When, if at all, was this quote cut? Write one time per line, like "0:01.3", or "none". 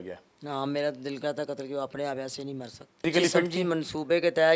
0:03.0